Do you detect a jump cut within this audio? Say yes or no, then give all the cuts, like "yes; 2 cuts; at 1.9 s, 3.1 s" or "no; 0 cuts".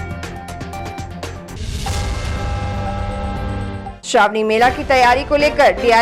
yes; 2 cuts; at 1.6 s, 4.0 s